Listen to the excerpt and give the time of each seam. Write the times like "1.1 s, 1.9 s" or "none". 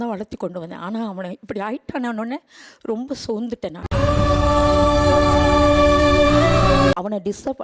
none